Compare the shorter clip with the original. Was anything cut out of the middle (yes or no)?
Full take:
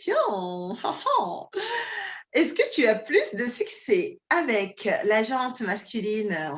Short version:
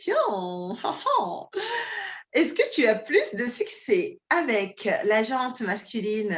no